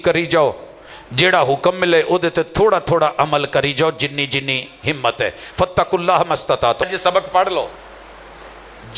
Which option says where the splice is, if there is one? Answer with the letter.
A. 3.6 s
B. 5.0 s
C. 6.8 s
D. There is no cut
C